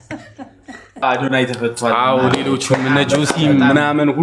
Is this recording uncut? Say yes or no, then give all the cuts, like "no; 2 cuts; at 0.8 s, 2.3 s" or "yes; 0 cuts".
no; 1 cut; at 1.0 s